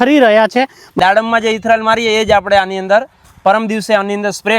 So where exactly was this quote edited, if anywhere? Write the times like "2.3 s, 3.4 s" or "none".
1.0 s